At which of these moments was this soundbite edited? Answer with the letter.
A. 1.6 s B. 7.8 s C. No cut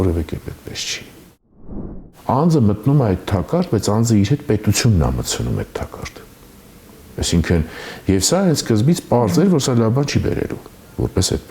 A